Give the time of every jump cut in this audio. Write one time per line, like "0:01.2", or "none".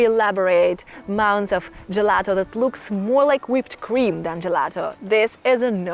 none

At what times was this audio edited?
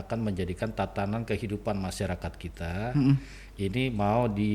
none

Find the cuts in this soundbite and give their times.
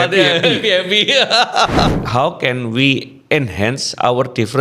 0:01.9

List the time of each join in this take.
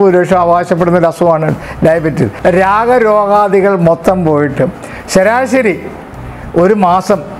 0:02.3

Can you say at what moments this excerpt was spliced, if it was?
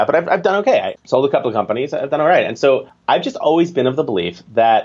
0:01.0
0:02.9

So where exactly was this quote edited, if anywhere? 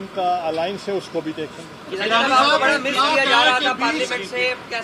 none

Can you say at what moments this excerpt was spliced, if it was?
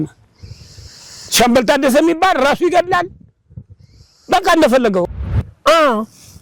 0:05.0

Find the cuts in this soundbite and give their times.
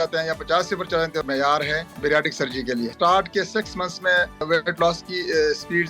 0:01.4
0:02.9
0:04.4

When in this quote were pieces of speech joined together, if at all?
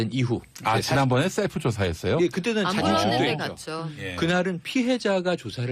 0:01.1

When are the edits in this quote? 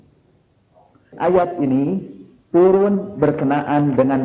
0:01.1

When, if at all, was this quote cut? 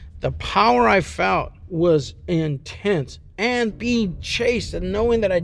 0:01.6
0:03.7

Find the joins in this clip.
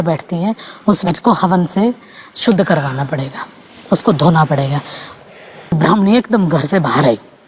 0:01.1
0:05.8

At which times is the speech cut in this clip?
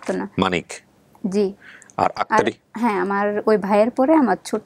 none

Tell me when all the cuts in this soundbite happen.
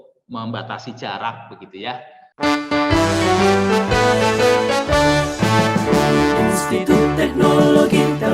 0:02.2

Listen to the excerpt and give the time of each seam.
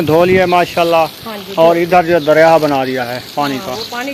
none

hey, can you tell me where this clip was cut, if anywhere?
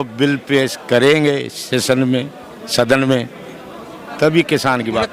none

